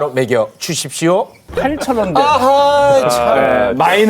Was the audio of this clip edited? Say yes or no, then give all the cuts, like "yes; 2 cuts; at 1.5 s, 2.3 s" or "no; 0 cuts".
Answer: yes; 1 cut; at 1.4 s